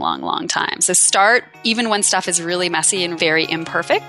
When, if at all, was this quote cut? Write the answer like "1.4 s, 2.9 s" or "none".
3.1 s